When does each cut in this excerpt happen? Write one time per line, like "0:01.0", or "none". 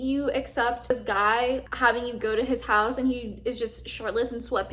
0:00.9